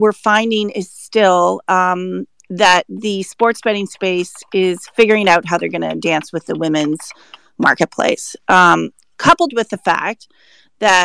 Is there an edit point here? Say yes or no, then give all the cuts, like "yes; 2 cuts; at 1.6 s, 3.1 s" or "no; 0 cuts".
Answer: no; 0 cuts